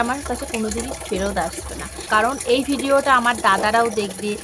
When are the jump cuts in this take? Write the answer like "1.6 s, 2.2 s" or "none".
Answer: 2.0 s

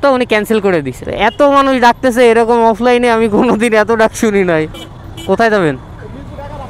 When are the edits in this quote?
1.0 s, 4.7 s

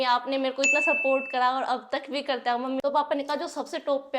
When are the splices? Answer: 2.8 s

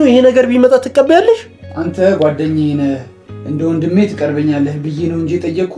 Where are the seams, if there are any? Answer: 1.7 s

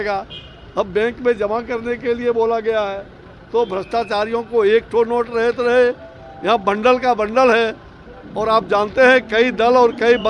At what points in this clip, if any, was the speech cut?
none

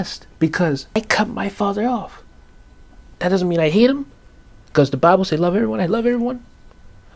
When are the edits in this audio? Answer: 1.0 s

